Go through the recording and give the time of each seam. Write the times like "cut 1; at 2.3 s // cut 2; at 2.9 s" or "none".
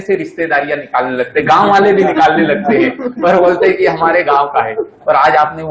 none